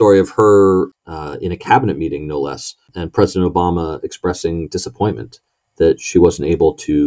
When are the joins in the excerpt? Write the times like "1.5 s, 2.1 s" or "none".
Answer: 1.0 s, 2.9 s

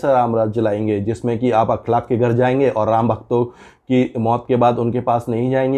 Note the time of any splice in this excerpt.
none

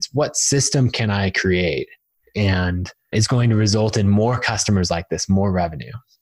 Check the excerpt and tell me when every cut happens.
2.2 s, 3.1 s

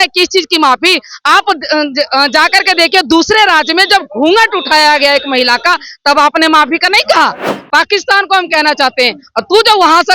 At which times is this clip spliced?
7.5 s

